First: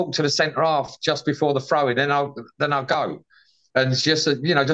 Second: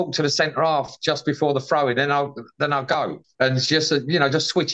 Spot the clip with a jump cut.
second; 1 cut; at 3.2 s

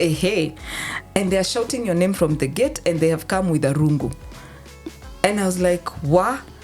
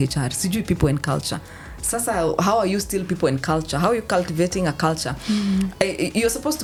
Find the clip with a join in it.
first; 1 cut; at 0.9 s

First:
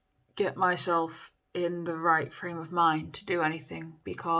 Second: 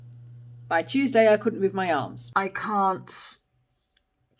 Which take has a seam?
second; 1 cut; at 2.2 s

